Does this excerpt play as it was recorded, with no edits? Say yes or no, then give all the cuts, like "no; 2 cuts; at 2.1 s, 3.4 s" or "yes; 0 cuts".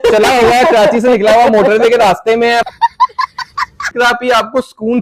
no; 2 cuts; at 2.6 s, 3.9 s